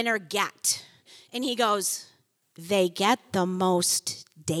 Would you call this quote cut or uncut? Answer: cut